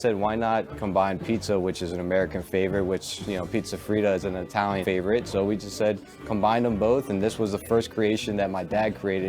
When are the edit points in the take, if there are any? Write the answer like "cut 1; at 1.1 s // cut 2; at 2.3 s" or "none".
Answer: cut 1; at 4.8 s